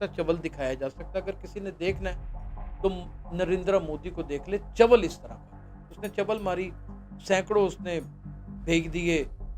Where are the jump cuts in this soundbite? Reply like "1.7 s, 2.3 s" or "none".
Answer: none